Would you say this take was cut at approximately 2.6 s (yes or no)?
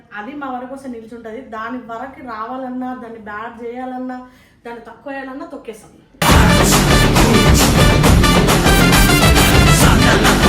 no